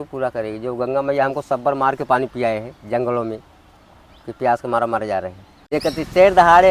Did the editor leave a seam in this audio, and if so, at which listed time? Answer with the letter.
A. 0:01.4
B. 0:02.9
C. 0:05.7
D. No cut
C